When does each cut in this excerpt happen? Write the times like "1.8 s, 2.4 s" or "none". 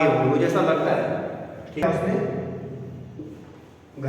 1.8 s